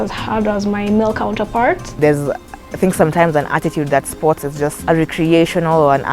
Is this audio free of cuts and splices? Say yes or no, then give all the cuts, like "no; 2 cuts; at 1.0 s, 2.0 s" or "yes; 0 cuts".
no; 2 cuts; at 2.0 s, 4.8 s